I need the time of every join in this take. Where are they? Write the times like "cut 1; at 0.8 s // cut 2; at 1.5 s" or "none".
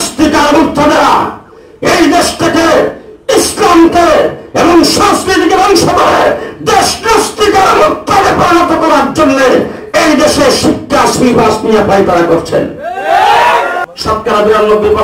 cut 1; at 13.9 s